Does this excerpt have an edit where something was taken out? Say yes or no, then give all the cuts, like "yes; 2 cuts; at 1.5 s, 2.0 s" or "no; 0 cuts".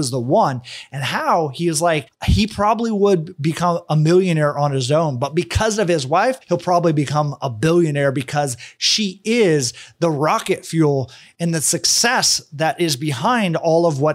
yes; 1 cut; at 6.4 s